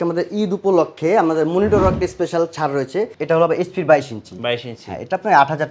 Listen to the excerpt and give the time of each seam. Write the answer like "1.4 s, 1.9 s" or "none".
3.2 s